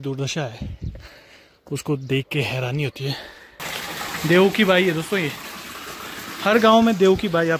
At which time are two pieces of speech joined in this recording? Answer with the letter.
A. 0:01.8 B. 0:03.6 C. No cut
B